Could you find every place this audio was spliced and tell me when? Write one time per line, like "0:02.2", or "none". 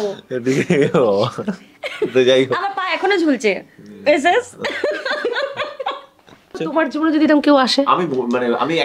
0:06.6